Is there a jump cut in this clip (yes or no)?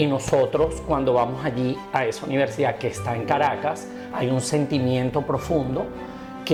no